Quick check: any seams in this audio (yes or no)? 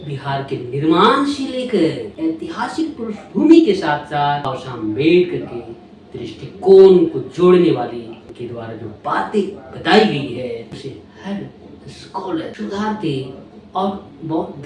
yes